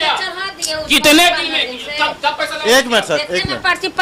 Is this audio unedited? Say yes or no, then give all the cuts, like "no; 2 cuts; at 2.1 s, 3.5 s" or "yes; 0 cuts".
yes; 0 cuts